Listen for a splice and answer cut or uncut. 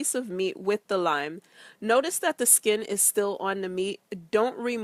uncut